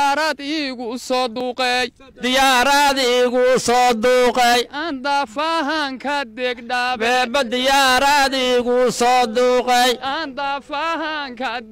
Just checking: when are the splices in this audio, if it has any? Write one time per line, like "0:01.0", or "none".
0:01.4